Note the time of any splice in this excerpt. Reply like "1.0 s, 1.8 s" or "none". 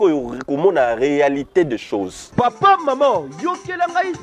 2.4 s